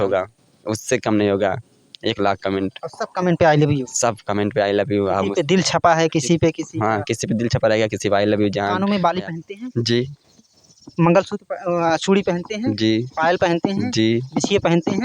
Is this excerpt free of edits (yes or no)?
yes